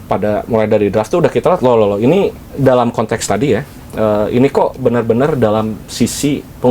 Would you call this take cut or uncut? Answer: uncut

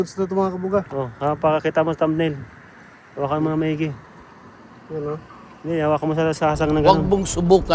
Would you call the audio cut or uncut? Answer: cut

